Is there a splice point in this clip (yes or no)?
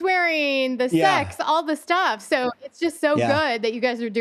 no